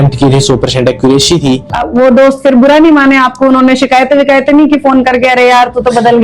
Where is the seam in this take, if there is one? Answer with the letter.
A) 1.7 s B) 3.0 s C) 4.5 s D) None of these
A